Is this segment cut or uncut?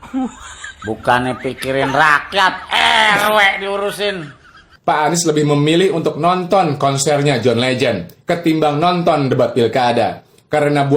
cut